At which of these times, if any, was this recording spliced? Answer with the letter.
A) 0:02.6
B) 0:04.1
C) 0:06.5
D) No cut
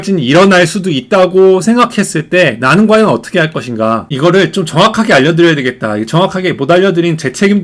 B